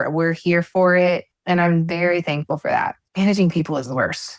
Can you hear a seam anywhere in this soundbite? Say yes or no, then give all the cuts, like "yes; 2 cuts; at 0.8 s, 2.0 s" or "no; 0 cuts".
no; 0 cuts